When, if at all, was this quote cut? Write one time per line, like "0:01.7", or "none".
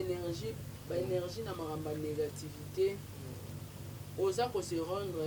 none